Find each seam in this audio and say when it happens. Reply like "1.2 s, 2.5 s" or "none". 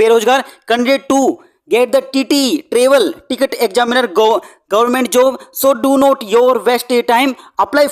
none